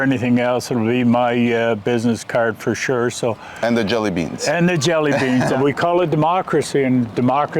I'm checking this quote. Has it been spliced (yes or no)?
yes